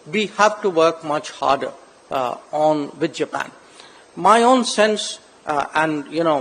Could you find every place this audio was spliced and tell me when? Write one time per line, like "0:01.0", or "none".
none